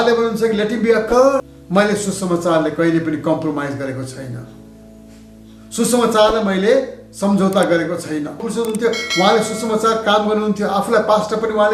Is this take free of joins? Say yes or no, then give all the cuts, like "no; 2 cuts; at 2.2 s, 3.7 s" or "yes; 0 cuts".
no; 2 cuts; at 1.6 s, 8.5 s